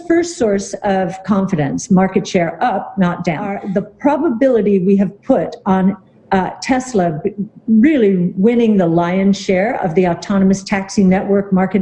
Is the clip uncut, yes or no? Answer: no